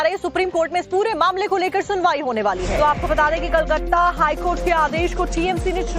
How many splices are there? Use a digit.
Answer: 1